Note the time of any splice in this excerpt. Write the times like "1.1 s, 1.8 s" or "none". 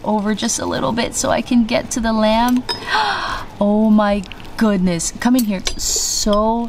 5.6 s